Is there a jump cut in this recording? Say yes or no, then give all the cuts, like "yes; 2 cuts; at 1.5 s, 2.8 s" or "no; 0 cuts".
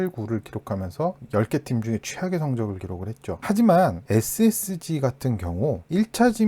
yes; 1 cut; at 3.4 s